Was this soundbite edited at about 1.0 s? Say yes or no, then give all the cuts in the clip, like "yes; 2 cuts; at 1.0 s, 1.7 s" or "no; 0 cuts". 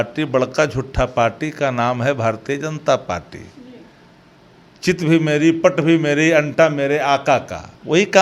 no; 0 cuts